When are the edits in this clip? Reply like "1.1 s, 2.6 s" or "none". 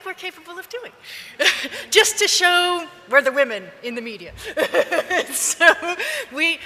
5.0 s